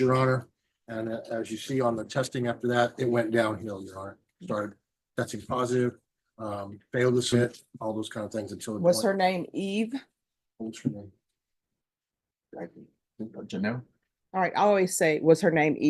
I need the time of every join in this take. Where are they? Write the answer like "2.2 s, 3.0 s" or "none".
7.3 s

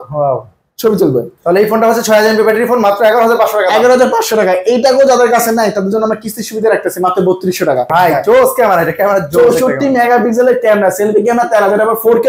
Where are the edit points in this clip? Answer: 1.3 s, 7.9 s

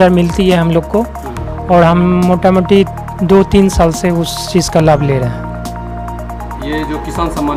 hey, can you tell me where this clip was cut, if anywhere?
none

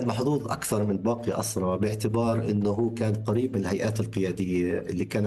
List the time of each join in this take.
none

